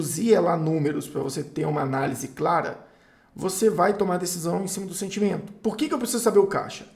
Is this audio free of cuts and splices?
no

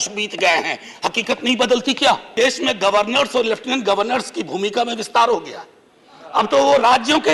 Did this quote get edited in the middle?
yes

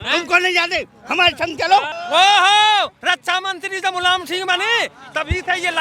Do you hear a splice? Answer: yes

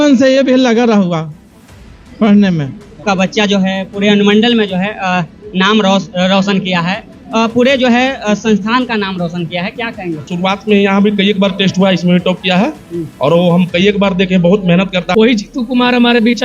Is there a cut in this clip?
yes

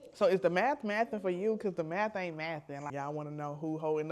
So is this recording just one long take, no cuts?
no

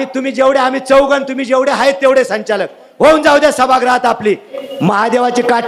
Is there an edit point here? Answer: yes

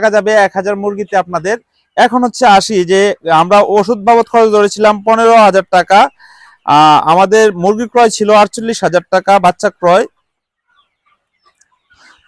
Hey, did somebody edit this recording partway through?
no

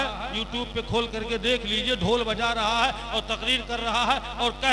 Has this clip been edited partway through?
no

